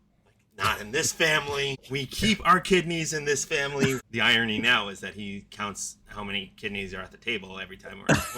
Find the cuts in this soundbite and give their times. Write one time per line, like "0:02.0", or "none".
0:01.8
0:04.0